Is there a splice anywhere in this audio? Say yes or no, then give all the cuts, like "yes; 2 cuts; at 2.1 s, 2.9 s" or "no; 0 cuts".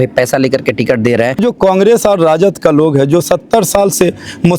yes; 1 cut; at 1.4 s